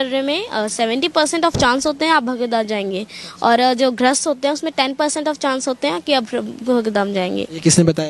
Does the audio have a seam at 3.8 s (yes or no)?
no